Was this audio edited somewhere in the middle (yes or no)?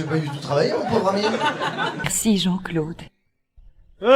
yes